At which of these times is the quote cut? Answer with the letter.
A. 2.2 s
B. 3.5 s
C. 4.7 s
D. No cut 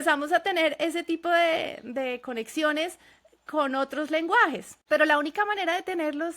C